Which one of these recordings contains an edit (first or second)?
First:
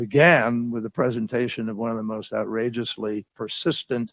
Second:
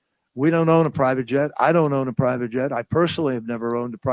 second